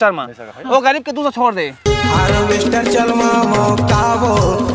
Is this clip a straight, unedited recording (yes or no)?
no